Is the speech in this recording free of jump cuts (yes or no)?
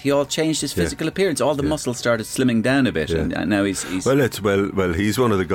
yes